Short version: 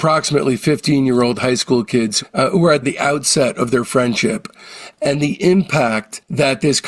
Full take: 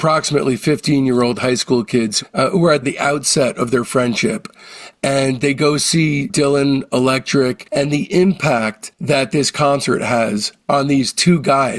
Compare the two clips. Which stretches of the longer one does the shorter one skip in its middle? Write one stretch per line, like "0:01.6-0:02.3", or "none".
0:04.9-0:07.6